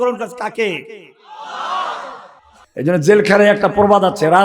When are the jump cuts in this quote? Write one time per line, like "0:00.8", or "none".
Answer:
0:02.3